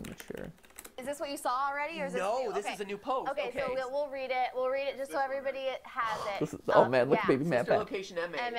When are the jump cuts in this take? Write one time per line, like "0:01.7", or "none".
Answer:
0:01.0